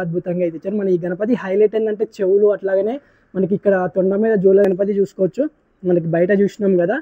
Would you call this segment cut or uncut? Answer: cut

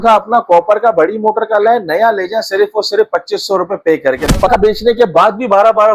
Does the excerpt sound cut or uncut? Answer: cut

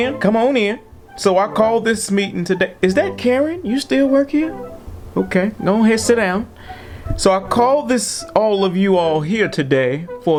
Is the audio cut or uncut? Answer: uncut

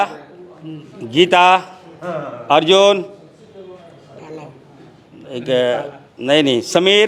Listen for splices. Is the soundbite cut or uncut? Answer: uncut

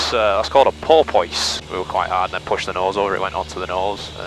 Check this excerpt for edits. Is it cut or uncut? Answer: cut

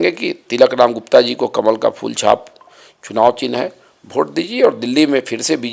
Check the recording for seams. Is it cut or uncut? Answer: uncut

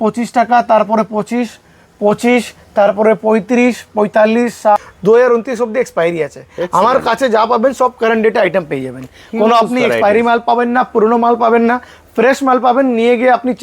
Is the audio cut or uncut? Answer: cut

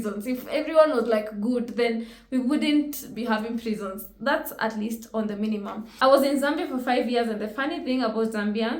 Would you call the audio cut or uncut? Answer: cut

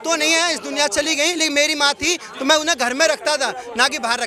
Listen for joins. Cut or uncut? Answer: uncut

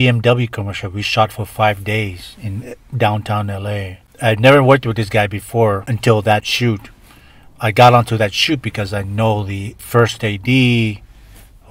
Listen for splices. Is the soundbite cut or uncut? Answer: uncut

